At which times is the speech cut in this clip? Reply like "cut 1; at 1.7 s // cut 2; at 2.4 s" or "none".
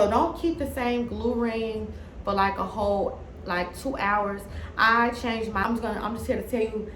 cut 1; at 5.6 s